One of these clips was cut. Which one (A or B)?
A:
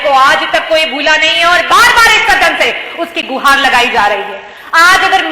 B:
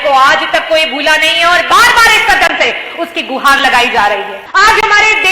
B